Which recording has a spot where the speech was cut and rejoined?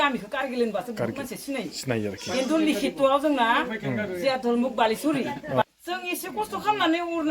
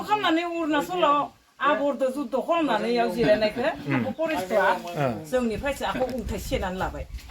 first; 1 cut; at 5.6 s

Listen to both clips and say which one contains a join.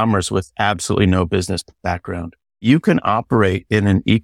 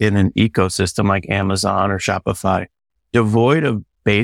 first; 1 cut; at 2.6 s

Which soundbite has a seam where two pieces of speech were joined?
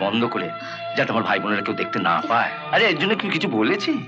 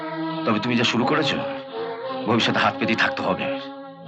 first; 1 cut; at 2.6 s

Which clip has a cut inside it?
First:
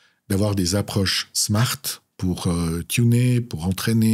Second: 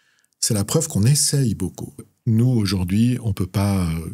second; 1 cut; at 2.1 s

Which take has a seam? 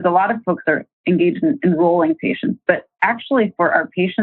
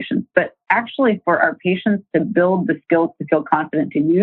first; 1 cut; at 1.0 s

